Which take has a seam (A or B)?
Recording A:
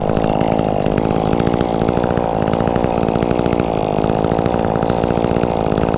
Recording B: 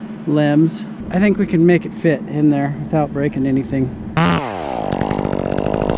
B